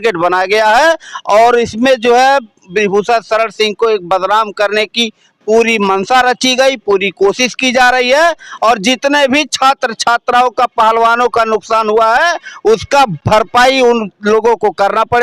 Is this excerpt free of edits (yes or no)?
yes